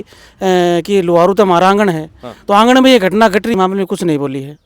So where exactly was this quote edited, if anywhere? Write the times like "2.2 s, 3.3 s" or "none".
3.5 s